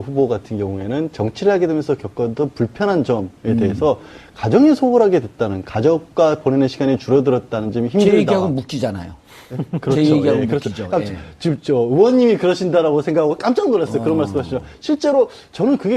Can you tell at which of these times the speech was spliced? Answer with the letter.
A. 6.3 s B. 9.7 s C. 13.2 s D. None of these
A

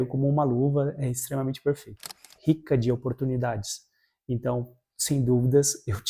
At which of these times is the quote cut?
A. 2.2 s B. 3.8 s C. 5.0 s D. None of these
A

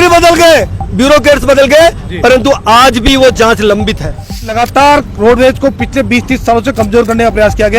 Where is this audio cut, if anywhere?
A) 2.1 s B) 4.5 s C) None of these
B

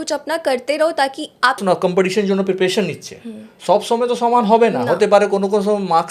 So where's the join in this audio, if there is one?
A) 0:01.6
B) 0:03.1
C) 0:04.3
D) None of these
A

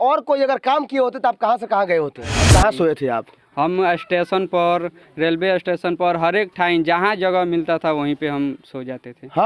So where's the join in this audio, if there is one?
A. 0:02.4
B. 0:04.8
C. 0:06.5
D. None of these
A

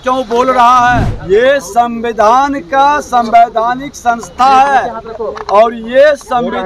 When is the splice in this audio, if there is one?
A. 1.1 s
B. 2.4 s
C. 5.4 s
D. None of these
A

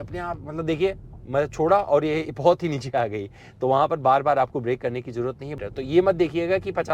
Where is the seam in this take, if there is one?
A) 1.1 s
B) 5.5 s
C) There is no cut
B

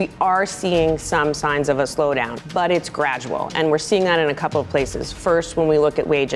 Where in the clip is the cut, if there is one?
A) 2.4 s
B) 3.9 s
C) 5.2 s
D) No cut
A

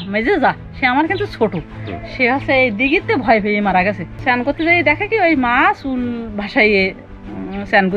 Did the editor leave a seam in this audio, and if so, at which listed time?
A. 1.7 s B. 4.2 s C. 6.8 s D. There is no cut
B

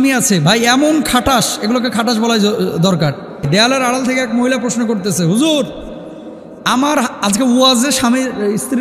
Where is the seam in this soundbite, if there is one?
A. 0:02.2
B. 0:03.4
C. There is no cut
B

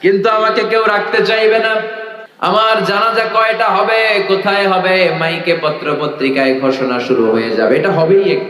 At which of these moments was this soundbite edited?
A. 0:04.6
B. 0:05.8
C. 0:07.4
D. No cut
D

